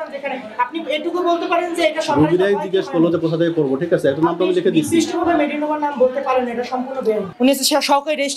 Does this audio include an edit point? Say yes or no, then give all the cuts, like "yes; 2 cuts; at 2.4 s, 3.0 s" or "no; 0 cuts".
yes; 1 cut; at 7.3 s